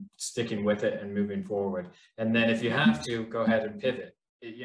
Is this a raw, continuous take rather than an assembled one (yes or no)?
yes